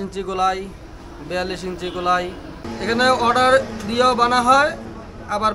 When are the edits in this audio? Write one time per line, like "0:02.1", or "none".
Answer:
0:02.7